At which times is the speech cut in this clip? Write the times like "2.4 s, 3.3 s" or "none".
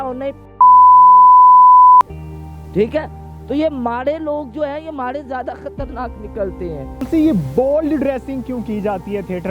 7.0 s

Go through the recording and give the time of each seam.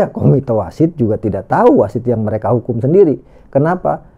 none

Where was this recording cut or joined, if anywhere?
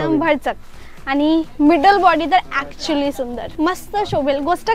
3.4 s

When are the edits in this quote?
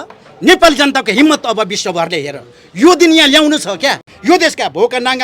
4.1 s

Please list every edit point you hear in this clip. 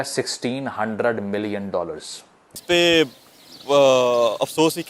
2.5 s

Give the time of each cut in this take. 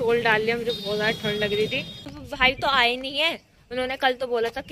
2.0 s

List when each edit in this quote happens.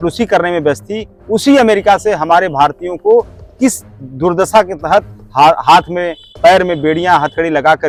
none

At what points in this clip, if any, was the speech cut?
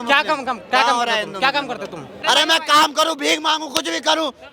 2.1 s

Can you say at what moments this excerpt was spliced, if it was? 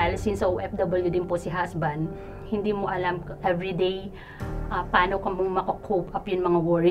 2.4 s

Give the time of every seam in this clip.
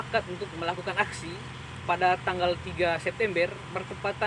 none

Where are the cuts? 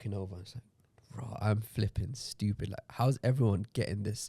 none

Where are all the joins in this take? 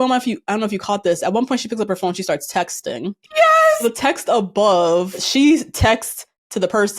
3.8 s, 5.2 s

